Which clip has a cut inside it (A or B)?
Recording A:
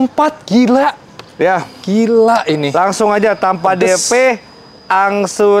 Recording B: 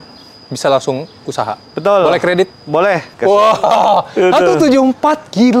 B